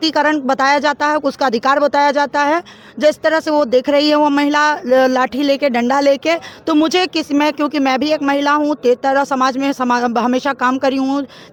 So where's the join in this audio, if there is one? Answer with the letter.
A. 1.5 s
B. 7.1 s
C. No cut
C